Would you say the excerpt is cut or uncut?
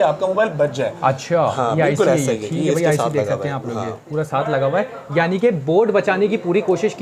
uncut